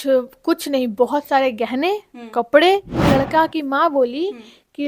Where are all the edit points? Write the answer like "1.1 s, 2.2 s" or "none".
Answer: 3.0 s